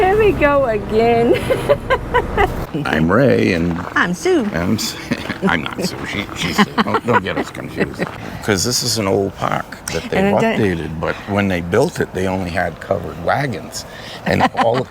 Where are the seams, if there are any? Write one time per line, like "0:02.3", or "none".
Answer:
0:02.7
0:08.1